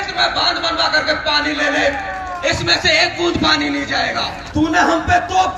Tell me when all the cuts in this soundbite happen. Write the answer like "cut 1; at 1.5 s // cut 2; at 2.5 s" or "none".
cut 1; at 4.3 s